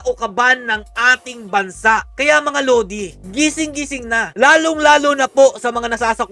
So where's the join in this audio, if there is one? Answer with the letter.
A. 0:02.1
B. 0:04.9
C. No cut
C